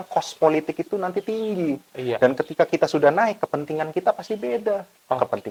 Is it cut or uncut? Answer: uncut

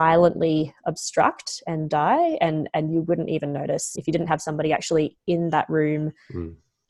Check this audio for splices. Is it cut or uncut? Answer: uncut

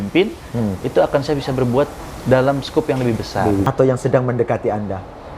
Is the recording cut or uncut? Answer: cut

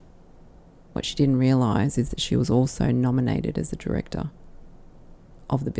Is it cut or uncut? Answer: uncut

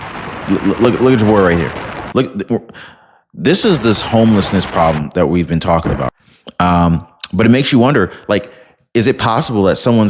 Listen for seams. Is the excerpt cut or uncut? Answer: cut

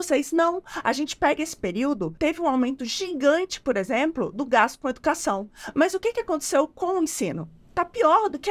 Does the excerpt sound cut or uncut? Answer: cut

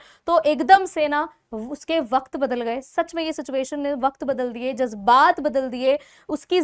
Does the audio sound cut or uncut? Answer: uncut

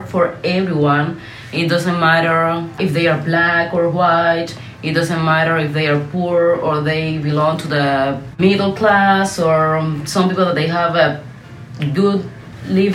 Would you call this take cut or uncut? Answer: uncut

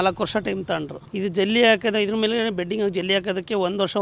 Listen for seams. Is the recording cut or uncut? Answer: cut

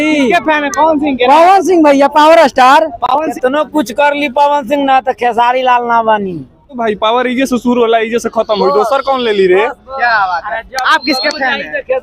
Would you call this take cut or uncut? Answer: cut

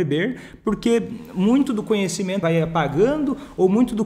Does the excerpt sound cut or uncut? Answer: cut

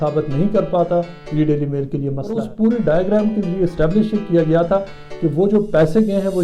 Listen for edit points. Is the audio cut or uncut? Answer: cut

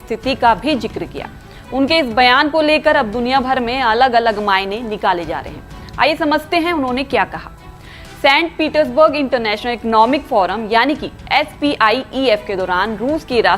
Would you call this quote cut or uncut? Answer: uncut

